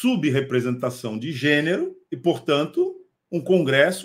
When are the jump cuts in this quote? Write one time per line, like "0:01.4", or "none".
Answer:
0:02.0